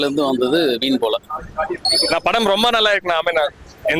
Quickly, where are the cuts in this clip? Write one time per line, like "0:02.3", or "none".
0:01.8